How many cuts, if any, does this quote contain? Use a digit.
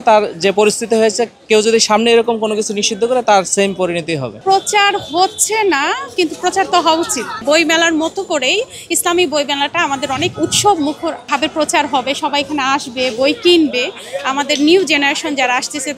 3